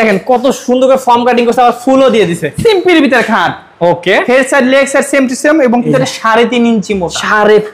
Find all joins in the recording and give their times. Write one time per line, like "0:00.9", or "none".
0:02.5
0:05.9